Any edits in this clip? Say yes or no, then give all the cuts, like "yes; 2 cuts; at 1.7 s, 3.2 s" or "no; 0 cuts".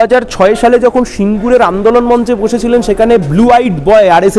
no; 0 cuts